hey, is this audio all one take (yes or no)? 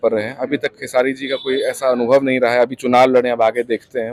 yes